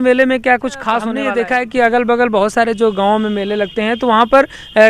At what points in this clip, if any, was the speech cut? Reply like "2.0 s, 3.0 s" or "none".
1.3 s